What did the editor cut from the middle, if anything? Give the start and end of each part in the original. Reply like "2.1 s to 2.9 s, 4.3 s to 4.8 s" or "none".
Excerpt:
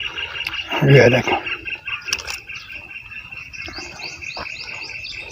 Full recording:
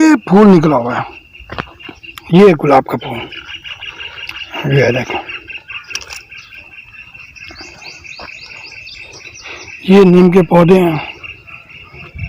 none